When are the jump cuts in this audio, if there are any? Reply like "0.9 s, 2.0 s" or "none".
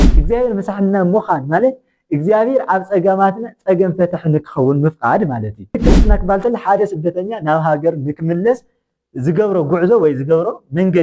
5.7 s